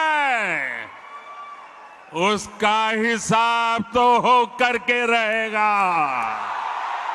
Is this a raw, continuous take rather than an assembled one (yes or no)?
yes